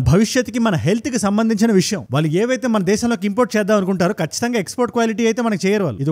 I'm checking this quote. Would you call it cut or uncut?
uncut